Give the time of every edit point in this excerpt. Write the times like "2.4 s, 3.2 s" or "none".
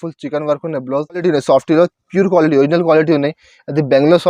1.2 s

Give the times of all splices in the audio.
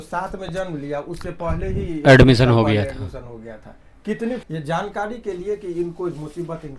4.4 s

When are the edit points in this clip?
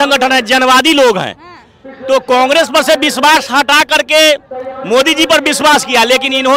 none

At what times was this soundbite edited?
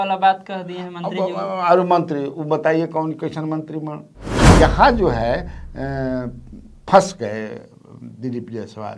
4.4 s

